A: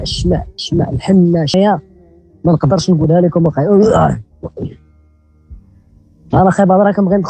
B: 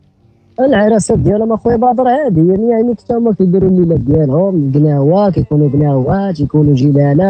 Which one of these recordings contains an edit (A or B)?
A